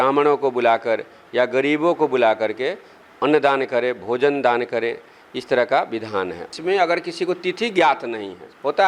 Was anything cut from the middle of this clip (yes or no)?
yes